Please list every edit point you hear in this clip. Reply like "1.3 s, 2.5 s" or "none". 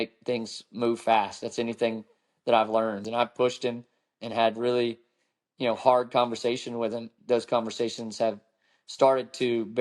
3.0 s, 7.1 s